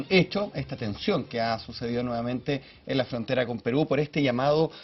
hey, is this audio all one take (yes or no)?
no